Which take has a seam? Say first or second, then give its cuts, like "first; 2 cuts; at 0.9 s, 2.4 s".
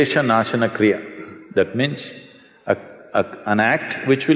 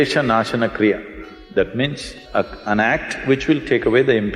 second; 1 cut; at 2.1 s